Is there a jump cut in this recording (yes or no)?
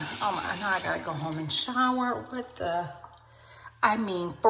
no